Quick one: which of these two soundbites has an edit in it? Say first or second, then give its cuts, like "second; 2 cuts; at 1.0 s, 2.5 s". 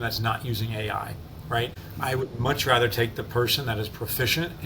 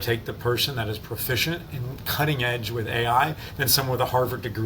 first; 1 cut; at 1.8 s